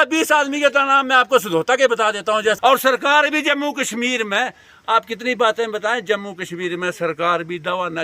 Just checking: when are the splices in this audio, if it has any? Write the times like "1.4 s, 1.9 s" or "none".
2.6 s